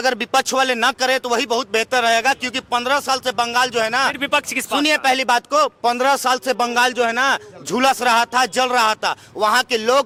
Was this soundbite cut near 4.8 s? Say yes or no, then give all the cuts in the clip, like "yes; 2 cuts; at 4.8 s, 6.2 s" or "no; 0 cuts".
no; 0 cuts